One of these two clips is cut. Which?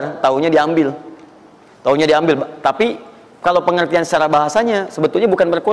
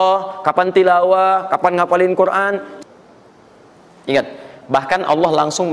second; 1 cut; at 2.7 s

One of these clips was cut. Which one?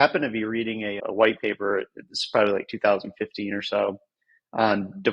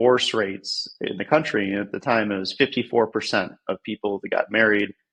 first; 1 cut; at 1.0 s

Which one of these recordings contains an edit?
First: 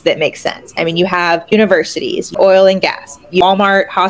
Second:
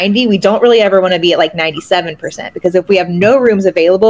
first; 2 cuts; at 1.8 s, 3.4 s

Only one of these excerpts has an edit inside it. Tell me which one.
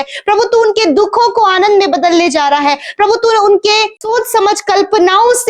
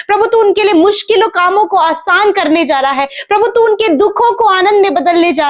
first; 1 cut; at 4.0 s

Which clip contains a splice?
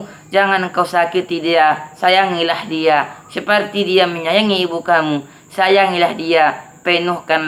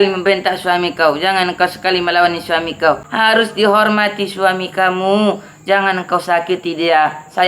second; 1 cut; at 3.1 s

